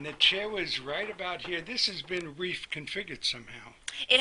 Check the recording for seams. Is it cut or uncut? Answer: cut